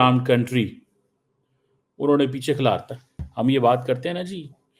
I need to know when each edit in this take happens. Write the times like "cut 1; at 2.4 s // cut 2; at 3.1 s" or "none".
none